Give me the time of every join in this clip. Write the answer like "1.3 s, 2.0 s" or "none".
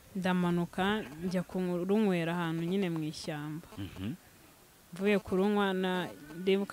none